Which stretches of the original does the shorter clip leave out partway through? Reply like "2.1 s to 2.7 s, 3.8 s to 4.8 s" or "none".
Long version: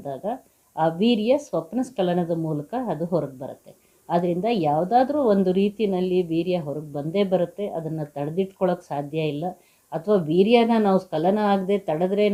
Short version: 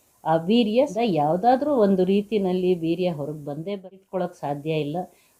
1.4 s to 4.4 s, 7.2 s to 8.2 s